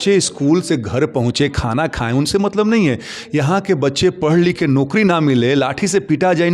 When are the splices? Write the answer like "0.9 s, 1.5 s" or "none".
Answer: none